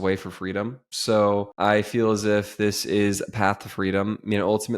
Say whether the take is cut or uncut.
cut